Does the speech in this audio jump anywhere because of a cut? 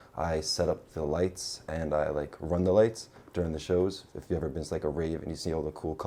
no; 0 cuts

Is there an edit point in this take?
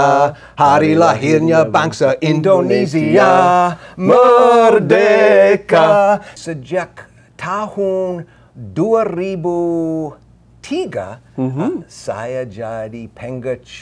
yes; 1 cut; at 6.3 s

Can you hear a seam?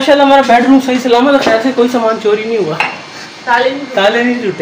no; 0 cuts

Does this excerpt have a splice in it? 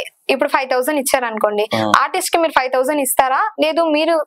no; 0 cuts

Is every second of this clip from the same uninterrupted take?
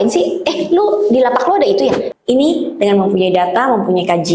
no; 1 cut; at 2.1 s

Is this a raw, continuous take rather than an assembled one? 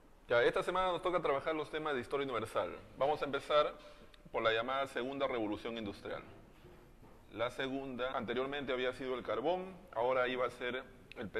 yes; 0 cuts

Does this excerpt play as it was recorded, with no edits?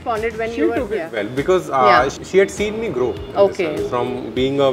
no; 1 cut; at 2.2 s

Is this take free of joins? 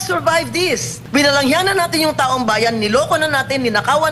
no; 1 cut; at 1.0 s

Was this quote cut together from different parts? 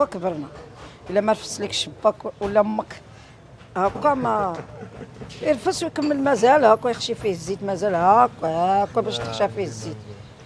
no; 0 cuts

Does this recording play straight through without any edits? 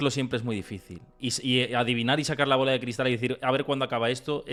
yes; 0 cuts

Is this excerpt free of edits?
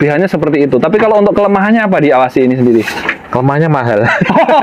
yes; 0 cuts

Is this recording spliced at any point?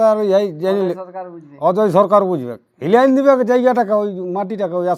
no; 0 cuts

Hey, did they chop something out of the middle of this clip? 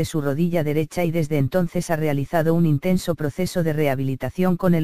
yes; 1 cut; at 1.4 s

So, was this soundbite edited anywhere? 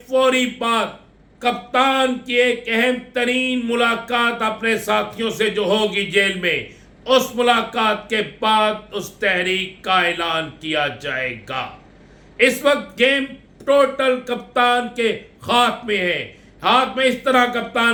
no; 0 cuts

